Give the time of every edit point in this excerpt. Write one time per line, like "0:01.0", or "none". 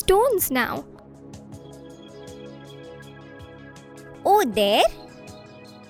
none